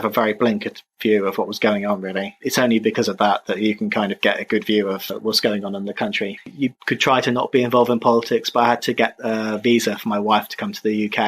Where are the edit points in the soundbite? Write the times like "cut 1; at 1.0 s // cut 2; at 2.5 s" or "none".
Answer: cut 1; at 2.4 s // cut 2; at 6.5 s